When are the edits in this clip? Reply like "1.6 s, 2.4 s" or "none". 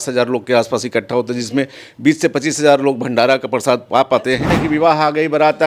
4.6 s

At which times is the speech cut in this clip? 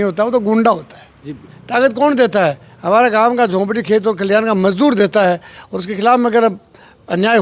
1.5 s

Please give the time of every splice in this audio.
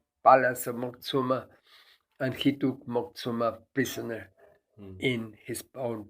none

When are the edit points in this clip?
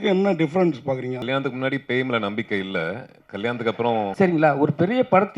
1.2 s, 4.1 s

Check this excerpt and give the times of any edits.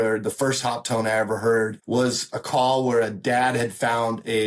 1.8 s

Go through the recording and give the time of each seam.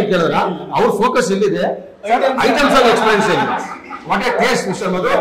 none

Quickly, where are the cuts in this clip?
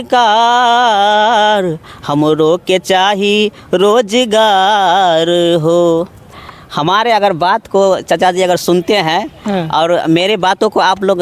6.5 s

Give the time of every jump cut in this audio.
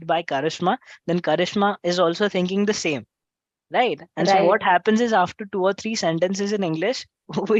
none

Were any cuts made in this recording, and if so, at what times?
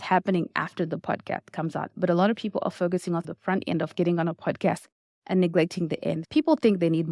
3.2 s, 6.2 s

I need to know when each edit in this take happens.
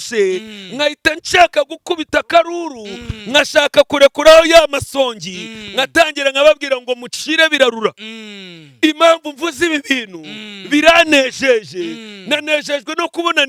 none

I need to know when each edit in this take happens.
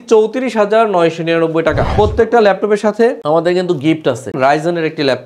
1.9 s, 4.3 s

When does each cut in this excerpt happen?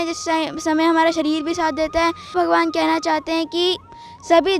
2.3 s

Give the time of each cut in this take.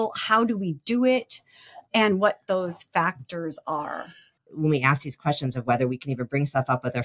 4.3 s

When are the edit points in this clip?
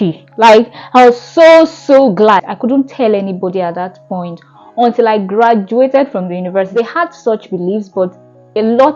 2.5 s, 6.7 s

